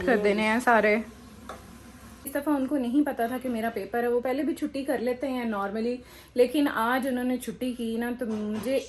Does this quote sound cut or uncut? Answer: cut